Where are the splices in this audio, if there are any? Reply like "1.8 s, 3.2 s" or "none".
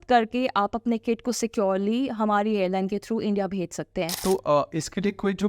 4.1 s

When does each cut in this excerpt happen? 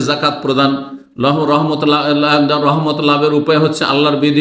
none

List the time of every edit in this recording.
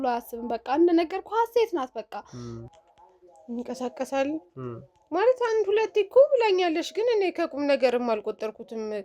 2.6 s

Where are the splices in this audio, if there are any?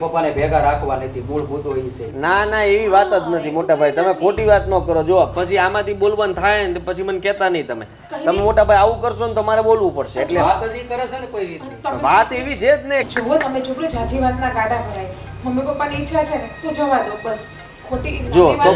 13.1 s

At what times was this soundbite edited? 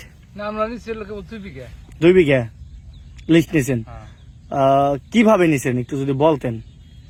none

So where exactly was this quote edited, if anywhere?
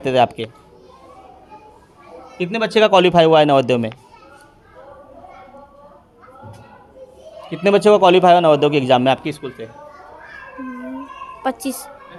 none

